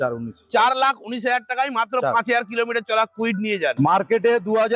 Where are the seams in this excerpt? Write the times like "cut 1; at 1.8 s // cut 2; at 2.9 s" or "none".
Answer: cut 1; at 3.8 s